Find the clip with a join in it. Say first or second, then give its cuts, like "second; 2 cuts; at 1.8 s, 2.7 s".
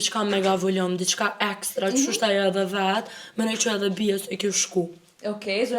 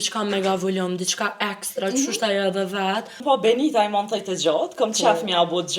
second; 1 cut; at 3.2 s